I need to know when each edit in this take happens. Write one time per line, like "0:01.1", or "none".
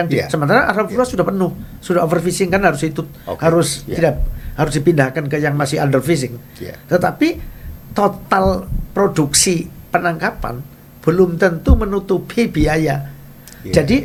none

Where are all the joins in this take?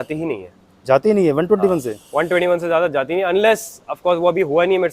none

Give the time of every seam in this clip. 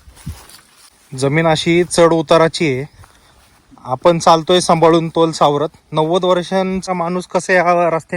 0:01.0
0:06.9

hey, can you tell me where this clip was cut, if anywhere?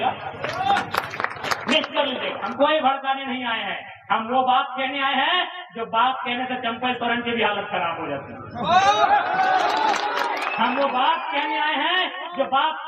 0:02.5

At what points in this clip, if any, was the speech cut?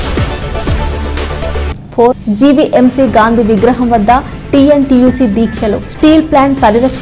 0:01.7

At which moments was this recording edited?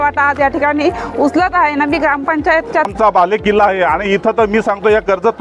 0:02.9

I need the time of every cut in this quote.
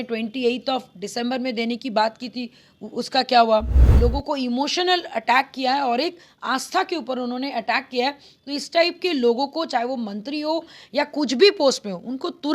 0:03.8

